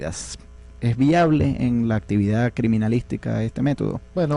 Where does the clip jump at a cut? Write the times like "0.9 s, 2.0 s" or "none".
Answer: 1.5 s